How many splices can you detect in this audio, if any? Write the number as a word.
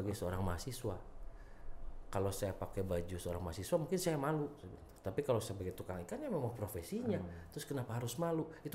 zero